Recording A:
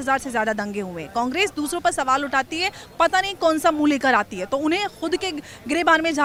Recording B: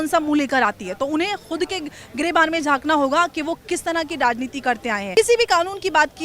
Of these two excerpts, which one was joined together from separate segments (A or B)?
B